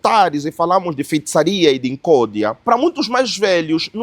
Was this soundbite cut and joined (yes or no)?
yes